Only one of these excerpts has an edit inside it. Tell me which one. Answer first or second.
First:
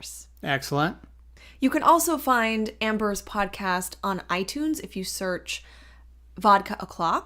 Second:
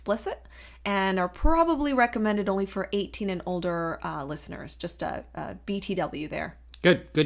first